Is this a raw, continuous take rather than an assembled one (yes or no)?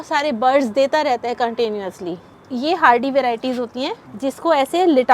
no